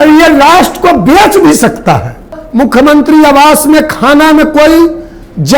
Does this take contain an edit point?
yes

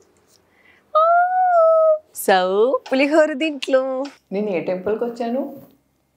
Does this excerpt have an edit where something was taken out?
yes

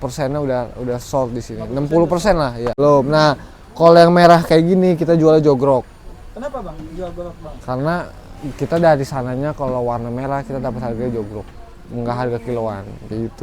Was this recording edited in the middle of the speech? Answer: yes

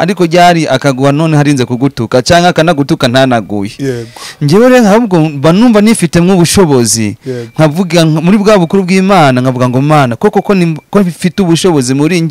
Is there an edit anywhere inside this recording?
no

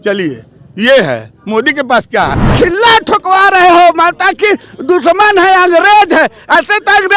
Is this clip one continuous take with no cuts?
no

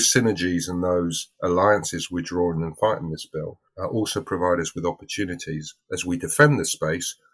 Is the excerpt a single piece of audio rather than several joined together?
yes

